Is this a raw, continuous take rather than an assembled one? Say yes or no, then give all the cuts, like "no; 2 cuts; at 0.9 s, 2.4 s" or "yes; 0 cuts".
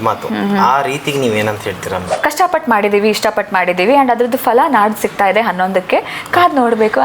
no; 1 cut; at 2.1 s